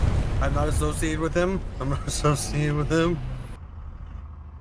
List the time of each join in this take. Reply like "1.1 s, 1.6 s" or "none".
3.1 s